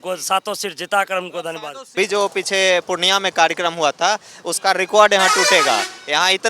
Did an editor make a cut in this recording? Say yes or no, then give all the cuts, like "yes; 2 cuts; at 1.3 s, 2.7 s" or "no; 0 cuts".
yes; 1 cut; at 1.9 s